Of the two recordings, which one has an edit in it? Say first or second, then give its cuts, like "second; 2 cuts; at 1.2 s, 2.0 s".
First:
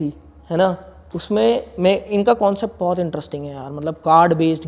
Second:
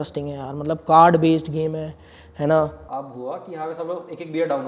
second; 1 cut; at 2.8 s